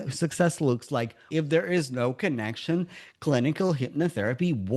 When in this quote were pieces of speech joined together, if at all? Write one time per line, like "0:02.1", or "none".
0:01.3

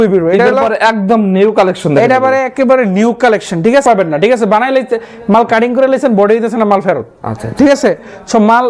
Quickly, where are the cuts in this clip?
0:03.8

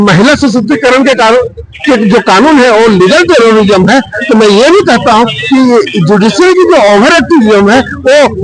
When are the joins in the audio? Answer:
none

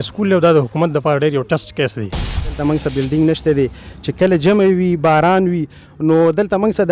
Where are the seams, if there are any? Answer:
0:02.6

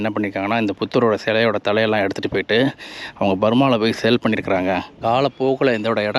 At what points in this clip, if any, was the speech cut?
0:04.9

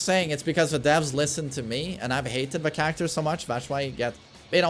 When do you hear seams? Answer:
none

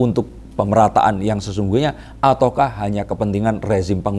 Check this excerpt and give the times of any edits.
none

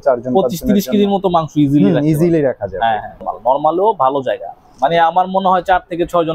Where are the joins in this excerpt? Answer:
0:03.3

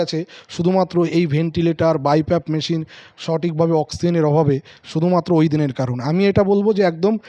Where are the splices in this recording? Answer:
none

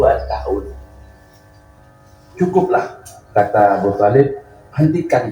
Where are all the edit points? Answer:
0:01.8

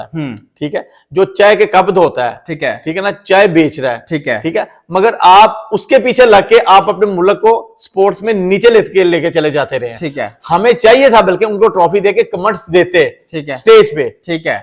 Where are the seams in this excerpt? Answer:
none

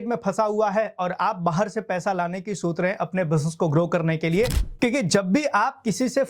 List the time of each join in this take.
0:04.6

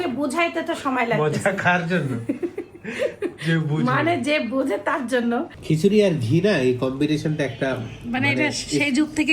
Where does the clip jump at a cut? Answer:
0:05.5

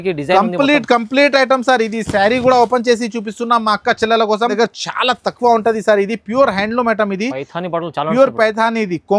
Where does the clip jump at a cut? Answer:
0:04.5

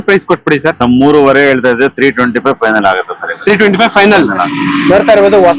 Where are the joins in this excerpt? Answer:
0:04.5

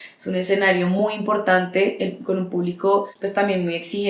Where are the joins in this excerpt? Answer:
0:03.2

